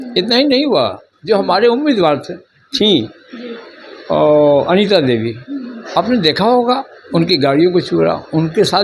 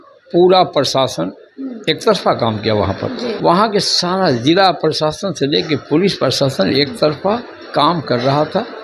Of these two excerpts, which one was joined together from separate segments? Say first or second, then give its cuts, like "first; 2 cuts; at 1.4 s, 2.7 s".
second; 1 cut; at 3.4 s